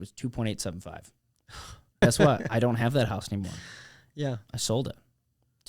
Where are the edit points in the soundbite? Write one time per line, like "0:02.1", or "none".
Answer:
0:02.0